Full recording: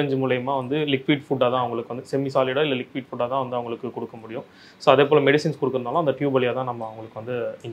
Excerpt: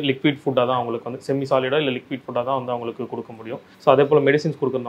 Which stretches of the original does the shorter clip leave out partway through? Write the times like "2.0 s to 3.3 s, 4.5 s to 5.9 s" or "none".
4.5 s to 4.6 s